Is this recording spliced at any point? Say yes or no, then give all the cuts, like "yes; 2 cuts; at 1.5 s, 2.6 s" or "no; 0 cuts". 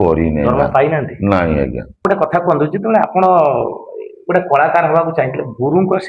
yes; 1 cut; at 2.0 s